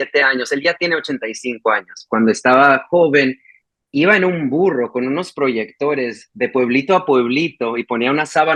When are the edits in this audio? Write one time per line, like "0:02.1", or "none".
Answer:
none